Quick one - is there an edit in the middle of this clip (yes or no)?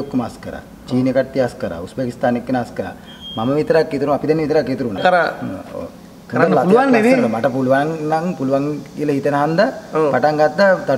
yes